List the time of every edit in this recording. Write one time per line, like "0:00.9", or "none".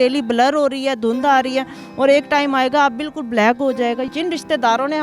0:04.1